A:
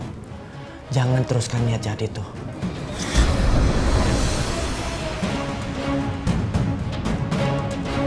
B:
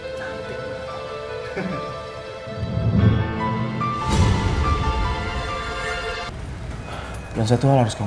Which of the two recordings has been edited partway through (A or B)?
B